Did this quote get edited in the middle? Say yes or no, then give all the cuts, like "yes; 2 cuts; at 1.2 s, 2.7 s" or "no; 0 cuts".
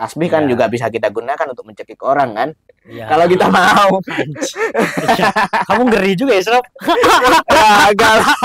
no; 0 cuts